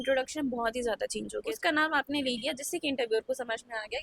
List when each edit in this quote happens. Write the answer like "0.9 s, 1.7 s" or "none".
1.5 s